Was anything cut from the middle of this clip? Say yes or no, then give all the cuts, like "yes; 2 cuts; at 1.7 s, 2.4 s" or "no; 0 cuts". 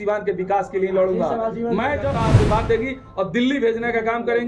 yes; 1 cut; at 2.2 s